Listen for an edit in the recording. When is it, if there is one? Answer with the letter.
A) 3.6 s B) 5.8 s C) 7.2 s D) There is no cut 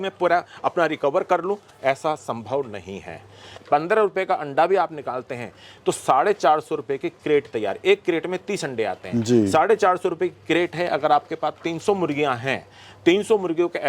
A